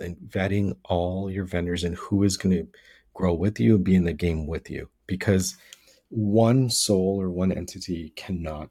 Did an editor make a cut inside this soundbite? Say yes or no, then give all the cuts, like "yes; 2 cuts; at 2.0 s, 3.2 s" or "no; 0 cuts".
no; 0 cuts